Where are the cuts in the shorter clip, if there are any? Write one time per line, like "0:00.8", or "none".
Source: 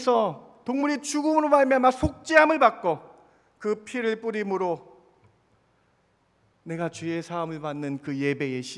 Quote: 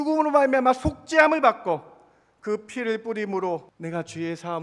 0:03.7